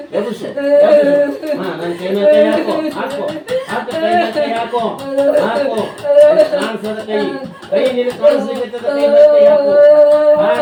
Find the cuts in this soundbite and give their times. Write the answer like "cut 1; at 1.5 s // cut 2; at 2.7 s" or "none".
none